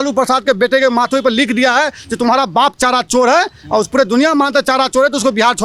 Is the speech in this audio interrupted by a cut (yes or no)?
no